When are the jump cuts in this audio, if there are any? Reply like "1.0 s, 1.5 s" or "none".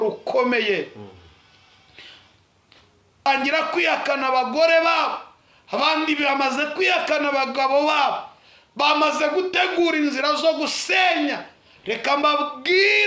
3.3 s